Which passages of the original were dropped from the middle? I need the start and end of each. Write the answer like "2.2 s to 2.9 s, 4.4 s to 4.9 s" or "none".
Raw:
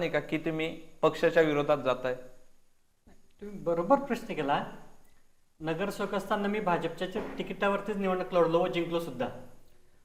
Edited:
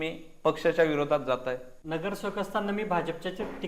2.3 s to 5.5 s